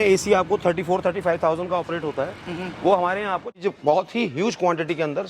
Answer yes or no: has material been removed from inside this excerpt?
yes